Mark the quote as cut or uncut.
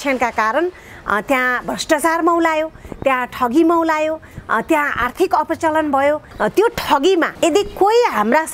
cut